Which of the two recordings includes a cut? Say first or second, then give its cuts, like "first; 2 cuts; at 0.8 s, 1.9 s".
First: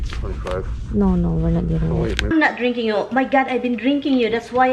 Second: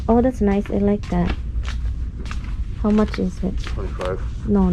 first; 1 cut; at 2.3 s